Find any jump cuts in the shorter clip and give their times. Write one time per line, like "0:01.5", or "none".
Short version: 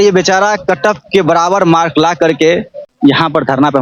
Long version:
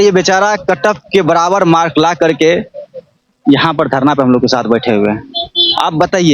0:02.8